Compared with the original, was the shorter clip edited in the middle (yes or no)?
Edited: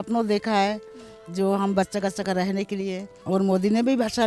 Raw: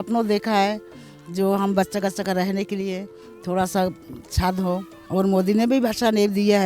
yes